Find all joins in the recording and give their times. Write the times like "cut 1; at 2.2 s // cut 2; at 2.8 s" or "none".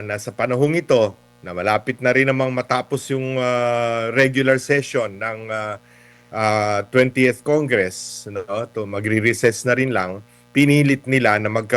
none